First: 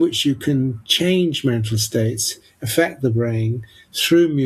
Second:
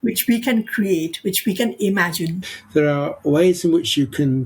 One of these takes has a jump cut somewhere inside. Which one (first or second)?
second